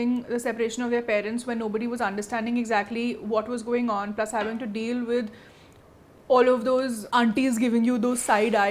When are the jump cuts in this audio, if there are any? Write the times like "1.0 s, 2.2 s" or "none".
none